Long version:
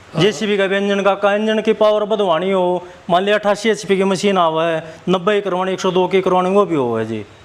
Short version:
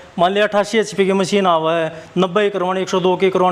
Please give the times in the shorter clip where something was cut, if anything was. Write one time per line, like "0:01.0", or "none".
none